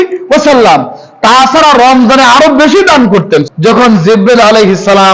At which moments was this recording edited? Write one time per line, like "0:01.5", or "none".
0:03.5